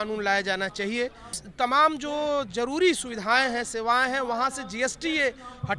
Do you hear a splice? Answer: yes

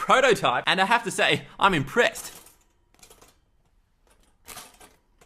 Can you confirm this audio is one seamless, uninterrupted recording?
yes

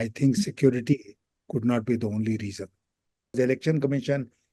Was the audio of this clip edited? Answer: yes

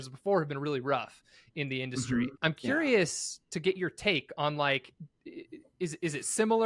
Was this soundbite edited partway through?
yes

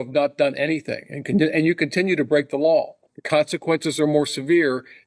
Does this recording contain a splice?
yes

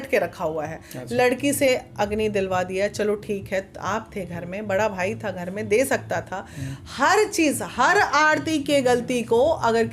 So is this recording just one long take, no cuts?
yes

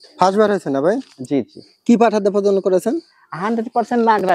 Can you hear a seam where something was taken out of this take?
no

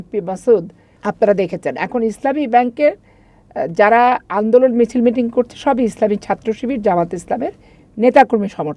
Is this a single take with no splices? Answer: no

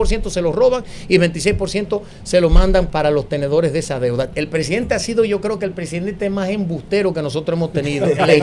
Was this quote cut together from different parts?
yes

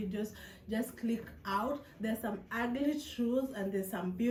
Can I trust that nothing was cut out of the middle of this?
yes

